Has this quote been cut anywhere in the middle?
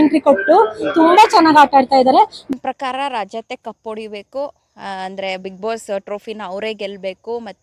yes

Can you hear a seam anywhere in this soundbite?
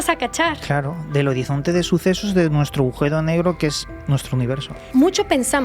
yes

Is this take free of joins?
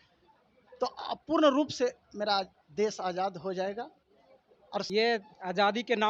no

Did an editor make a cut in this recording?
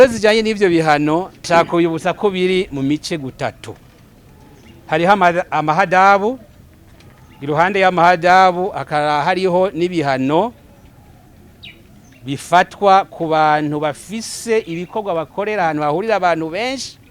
yes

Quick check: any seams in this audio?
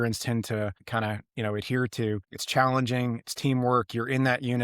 yes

